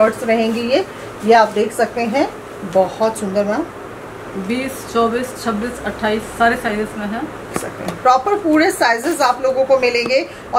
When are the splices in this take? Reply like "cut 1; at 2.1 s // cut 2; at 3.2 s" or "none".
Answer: cut 1; at 7.5 s